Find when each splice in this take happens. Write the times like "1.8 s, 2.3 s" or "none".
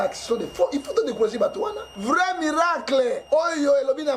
1.9 s, 3.2 s